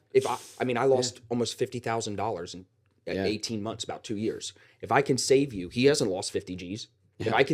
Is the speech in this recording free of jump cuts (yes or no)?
yes